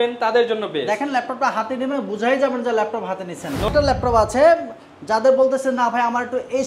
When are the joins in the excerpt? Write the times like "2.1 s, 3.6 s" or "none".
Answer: 3.7 s